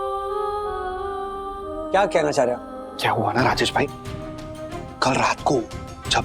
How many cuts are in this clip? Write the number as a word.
one